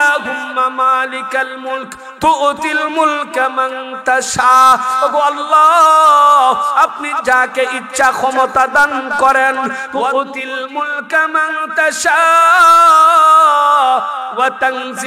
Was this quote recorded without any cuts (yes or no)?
no